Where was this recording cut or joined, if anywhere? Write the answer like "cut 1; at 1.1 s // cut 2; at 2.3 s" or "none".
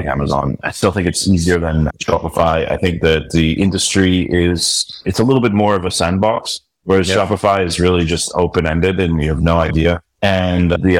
none